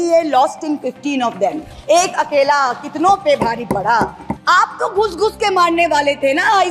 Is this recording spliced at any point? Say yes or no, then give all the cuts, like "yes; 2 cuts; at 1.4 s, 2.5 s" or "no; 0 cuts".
yes; 1 cut; at 4.3 s